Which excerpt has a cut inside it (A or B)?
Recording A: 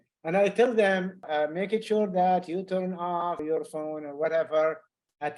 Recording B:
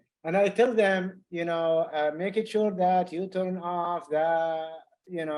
A